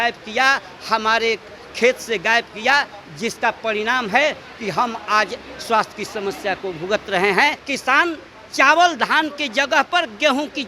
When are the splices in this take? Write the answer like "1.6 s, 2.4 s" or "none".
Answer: 7.6 s